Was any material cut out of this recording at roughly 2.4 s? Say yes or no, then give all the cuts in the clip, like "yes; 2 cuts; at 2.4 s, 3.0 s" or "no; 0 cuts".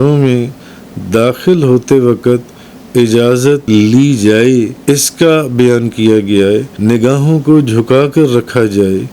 no; 3 cuts; at 3.6 s, 4.8 s, 6.7 s